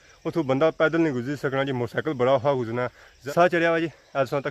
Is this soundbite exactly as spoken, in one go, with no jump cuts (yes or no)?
yes